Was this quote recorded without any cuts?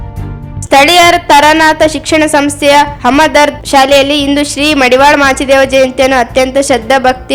yes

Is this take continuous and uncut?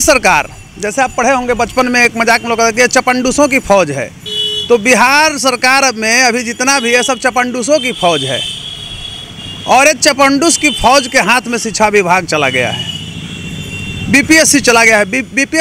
yes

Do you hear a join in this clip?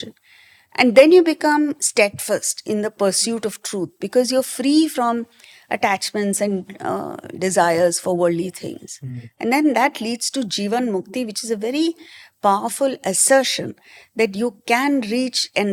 no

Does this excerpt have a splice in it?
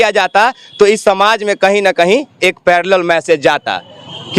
no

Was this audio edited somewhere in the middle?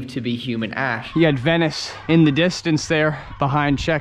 yes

